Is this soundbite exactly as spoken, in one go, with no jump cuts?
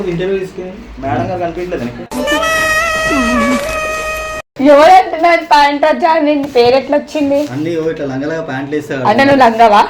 yes; 0 cuts

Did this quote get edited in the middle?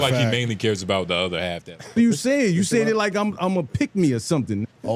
yes; 1 cut; at 1.7 s

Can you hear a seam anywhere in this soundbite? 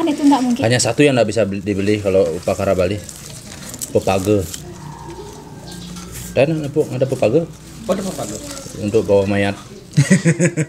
no; 0 cuts

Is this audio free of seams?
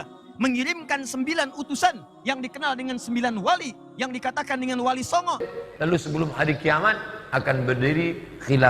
no; 1 cut; at 5.5 s

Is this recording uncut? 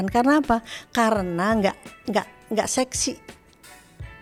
yes; 0 cuts

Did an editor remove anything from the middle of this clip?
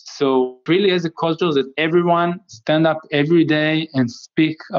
yes; 1 cut; at 1.7 s

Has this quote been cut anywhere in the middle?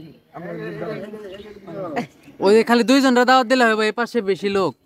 no; 0 cuts

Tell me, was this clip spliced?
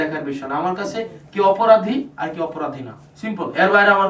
no; 0 cuts

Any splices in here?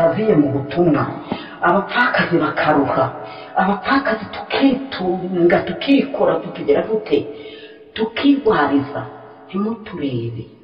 no; 0 cuts

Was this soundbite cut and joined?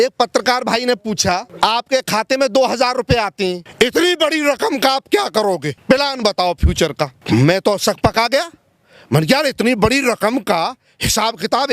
yes; 4 cuts; at 1.5 s, 3.6 s, 5.7 s, 7.2 s

